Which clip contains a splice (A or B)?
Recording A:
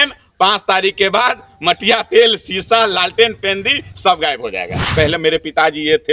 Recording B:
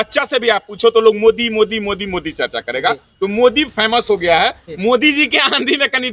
A